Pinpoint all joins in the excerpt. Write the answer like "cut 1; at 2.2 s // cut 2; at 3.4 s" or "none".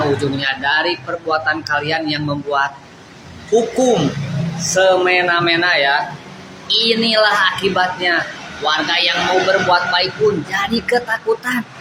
none